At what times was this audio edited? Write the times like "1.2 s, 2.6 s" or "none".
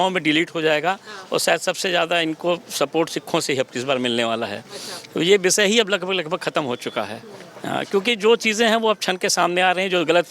none